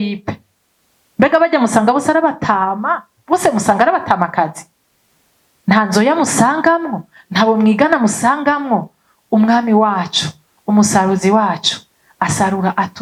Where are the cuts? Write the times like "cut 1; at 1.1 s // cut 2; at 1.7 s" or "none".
none